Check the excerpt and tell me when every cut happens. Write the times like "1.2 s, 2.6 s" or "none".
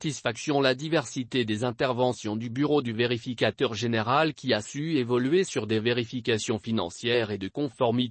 none